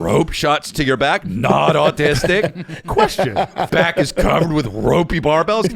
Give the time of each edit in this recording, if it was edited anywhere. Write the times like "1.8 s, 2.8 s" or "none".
3.7 s